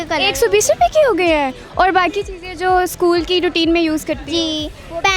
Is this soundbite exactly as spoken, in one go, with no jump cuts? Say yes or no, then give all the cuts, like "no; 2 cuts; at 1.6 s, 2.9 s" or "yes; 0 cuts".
yes; 0 cuts